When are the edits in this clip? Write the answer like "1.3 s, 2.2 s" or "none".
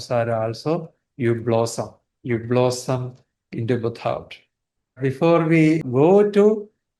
5.0 s, 5.8 s